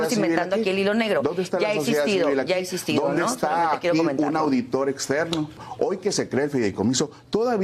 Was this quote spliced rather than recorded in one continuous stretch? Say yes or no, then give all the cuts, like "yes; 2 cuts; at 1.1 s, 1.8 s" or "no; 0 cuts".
yes; 1 cut; at 5.6 s